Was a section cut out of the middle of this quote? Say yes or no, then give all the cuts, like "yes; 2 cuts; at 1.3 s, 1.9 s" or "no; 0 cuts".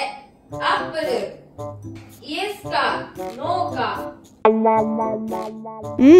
no; 0 cuts